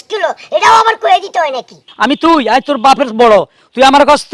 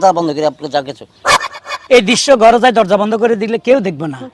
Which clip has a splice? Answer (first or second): first